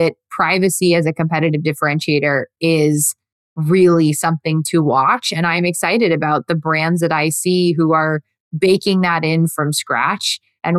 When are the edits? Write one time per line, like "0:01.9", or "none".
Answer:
none